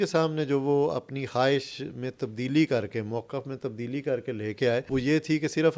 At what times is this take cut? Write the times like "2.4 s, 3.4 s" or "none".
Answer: 4.9 s